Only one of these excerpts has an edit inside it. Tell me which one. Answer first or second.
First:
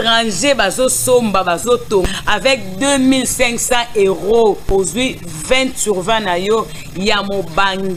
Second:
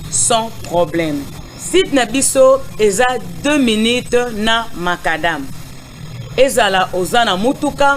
second